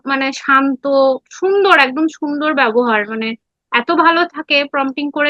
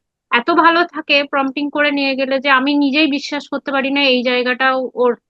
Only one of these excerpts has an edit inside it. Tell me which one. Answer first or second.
first